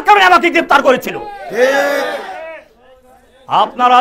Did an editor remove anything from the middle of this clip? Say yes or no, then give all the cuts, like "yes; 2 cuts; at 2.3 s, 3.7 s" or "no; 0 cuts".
no; 0 cuts